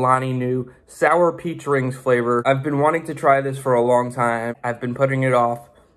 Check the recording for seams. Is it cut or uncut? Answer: cut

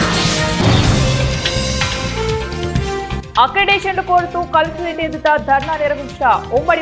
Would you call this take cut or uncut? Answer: uncut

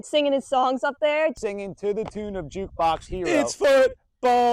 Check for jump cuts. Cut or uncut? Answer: cut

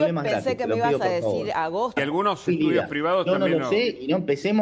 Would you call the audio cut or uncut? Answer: cut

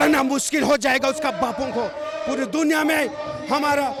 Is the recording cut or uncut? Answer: uncut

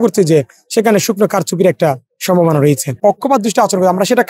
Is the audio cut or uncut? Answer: cut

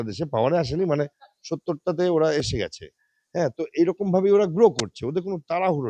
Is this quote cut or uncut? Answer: uncut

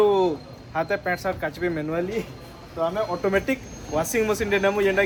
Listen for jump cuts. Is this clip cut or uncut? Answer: uncut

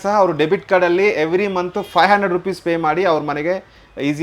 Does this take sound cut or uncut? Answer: uncut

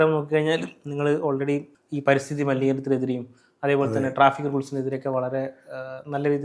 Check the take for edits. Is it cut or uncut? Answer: cut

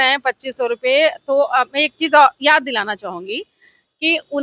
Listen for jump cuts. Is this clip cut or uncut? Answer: uncut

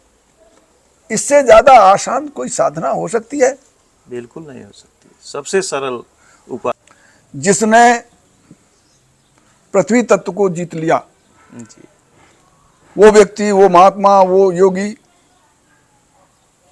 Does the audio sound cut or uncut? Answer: cut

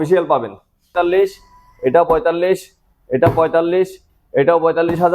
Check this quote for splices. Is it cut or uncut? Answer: cut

